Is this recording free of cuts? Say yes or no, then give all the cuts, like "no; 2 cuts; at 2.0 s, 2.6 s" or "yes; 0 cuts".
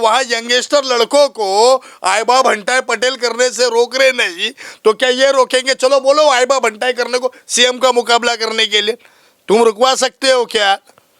yes; 0 cuts